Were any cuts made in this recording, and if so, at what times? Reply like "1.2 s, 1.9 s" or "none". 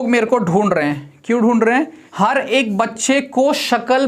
2.0 s